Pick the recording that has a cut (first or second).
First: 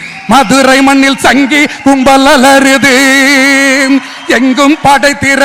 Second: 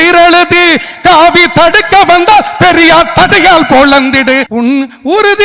second